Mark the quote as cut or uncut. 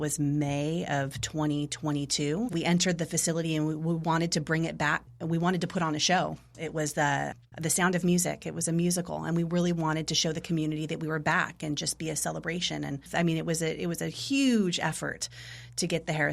cut